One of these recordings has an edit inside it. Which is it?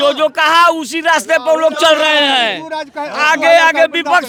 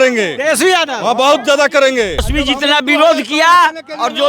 second; 1 cut; at 2.3 s

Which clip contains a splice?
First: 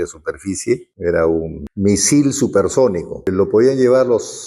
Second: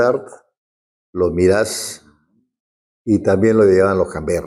first; 3 cuts; at 0.9 s, 1.6 s, 3.3 s

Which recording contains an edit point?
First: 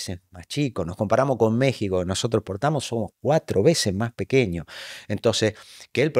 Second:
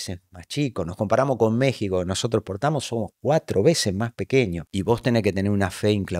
second; 1 cut; at 4.7 s

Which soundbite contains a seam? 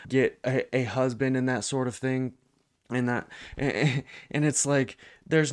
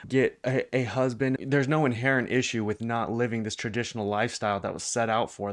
second; 1 cut; at 1.4 s

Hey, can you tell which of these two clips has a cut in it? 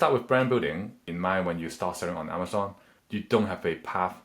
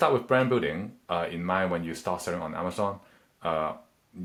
first; 2 cuts; at 1.0 s, 3.0 s

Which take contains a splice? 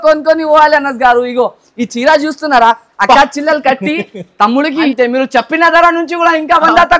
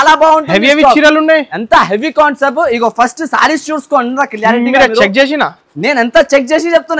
first; 1 cut; at 4.9 s

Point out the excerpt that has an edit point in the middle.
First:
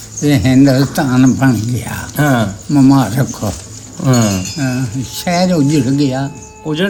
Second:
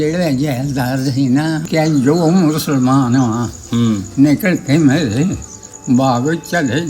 second; 1 cut; at 1.7 s

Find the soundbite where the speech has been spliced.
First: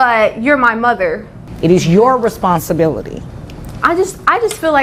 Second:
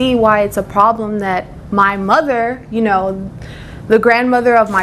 first; 1 cut; at 1.4 s

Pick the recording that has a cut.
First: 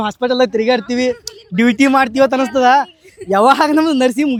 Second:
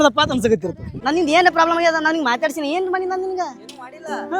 second; 1 cut; at 1.0 s

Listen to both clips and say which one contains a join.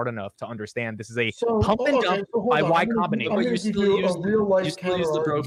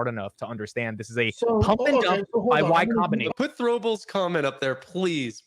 second; 1 cut; at 3.3 s

